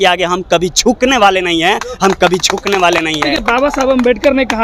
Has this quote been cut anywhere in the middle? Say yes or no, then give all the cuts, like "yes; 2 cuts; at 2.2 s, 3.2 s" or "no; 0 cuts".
no; 0 cuts